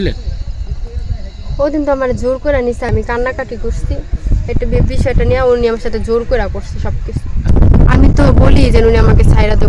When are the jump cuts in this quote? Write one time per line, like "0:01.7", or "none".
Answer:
0:02.9
0:07.4